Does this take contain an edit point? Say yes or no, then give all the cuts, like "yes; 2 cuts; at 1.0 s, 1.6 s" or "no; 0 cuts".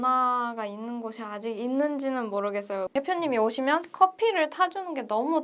yes; 1 cut; at 2.9 s